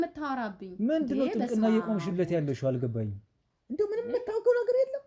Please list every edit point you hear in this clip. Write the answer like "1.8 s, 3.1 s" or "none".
none